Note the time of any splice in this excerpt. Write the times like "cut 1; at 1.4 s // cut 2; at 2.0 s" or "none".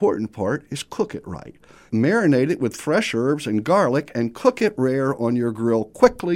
cut 1; at 1.8 s